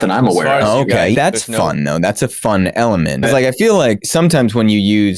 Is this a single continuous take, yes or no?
no